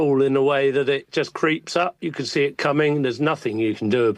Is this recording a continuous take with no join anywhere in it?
yes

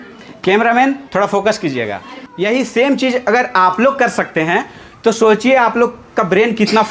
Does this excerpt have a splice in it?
yes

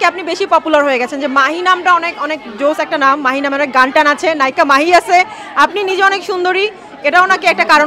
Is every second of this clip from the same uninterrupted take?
yes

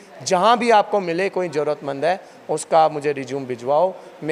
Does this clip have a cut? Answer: no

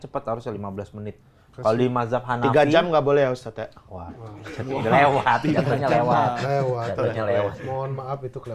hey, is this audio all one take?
yes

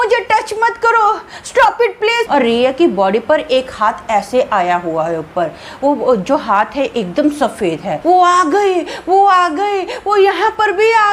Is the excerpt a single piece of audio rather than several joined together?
no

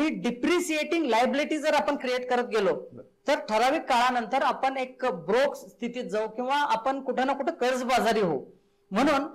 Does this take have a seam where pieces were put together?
no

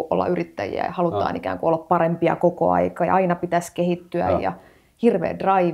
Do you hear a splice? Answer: no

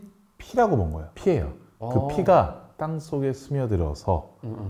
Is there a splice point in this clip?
yes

